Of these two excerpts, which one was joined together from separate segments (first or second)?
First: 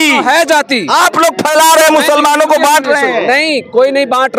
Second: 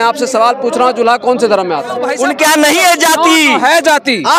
second